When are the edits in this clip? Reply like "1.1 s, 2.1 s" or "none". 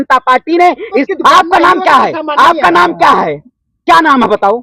1.1 s